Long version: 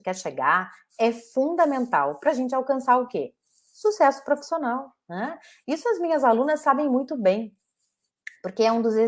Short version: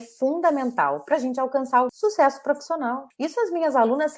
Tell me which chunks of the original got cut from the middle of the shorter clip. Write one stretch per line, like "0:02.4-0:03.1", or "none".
0:03.1-0:03.8
0:04.9-0:05.5